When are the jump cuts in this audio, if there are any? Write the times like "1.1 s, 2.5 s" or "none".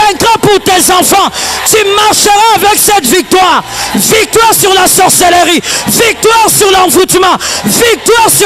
none